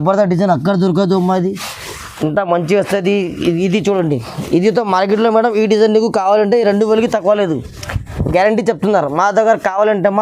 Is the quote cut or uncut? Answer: uncut